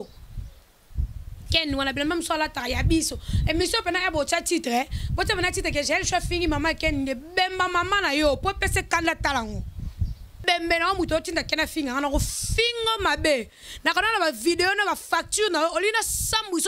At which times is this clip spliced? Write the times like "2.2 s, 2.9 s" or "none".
10.3 s